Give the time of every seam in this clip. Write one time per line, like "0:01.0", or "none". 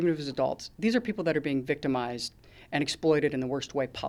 none